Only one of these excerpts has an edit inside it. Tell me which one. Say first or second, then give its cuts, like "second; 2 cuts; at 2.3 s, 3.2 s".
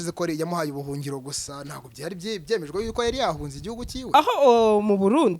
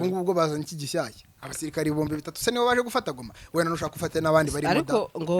first; 1 cut; at 4.1 s